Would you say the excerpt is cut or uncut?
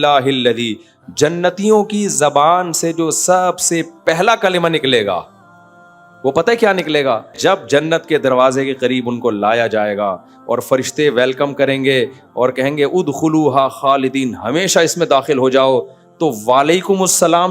cut